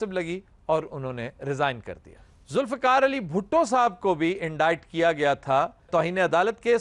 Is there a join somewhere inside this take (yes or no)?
no